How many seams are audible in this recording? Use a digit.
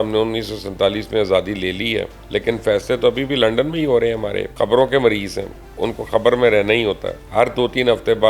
3